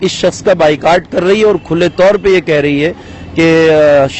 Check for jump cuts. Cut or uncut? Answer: uncut